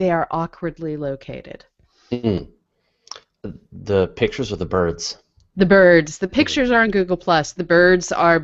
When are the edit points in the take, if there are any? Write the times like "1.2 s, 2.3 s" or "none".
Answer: none

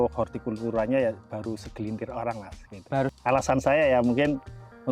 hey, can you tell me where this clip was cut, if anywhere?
3.1 s

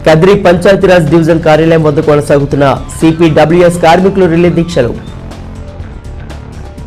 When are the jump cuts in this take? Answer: 5.0 s

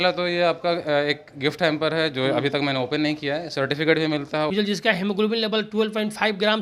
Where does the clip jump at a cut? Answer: 4.5 s

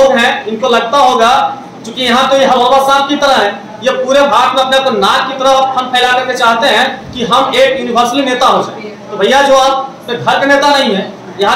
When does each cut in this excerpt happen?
none

